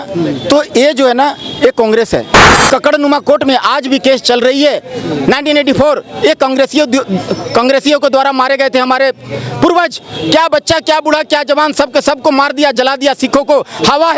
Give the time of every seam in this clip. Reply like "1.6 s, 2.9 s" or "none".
2.6 s